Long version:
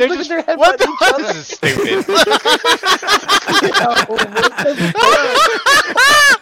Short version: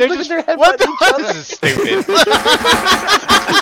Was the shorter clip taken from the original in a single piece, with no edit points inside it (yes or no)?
yes